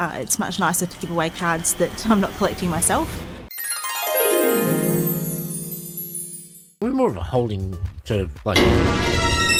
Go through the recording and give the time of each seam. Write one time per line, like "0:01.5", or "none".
none